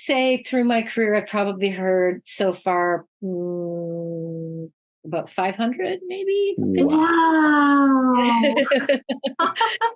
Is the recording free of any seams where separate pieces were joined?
yes; 0 cuts

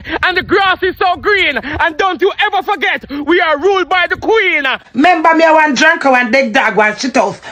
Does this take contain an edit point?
no; 0 cuts

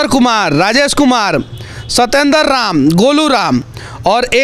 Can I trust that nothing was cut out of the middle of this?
yes; 0 cuts

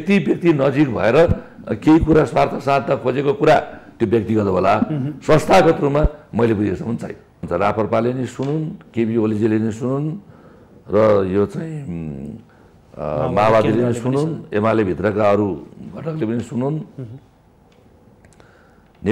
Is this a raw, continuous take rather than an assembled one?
no; 1 cut; at 7.4 s

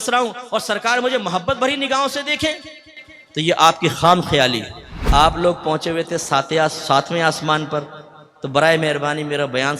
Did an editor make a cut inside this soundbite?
yes; 1 cut; at 4.9 s

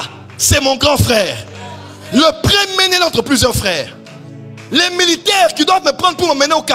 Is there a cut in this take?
no; 0 cuts

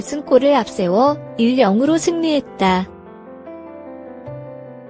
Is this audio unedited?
no; 1 cut; at 2.9 s

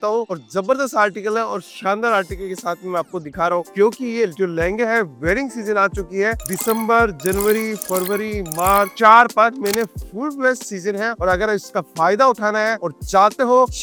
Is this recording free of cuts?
yes; 0 cuts

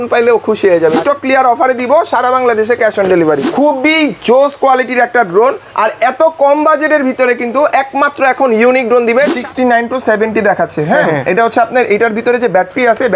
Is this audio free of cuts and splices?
no; 3 cuts; at 1.0 s, 3.5 s, 9.4 s

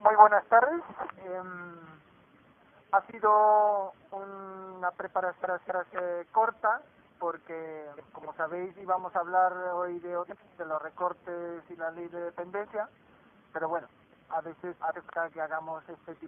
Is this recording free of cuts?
no; 1 cut; at 15.2 s

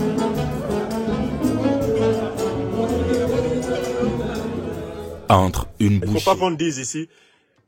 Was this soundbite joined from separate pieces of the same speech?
yes; 1 cut; at 6.1 s

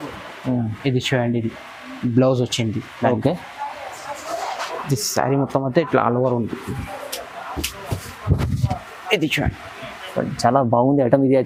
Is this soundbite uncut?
yes; 0 cuts

